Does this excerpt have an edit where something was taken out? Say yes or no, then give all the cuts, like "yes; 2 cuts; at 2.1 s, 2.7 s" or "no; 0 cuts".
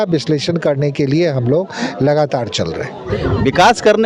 yes; 1 cut; at 3.1 s